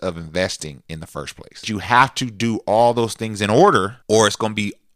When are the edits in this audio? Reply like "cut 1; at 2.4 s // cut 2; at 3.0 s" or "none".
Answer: cut 1; at 1.7 s // cut 2; at 4.0 s